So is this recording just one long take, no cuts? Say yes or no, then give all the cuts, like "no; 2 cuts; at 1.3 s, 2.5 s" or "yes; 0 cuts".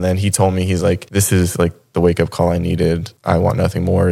no; 2 cuts; at 1.0 s, 3.1 s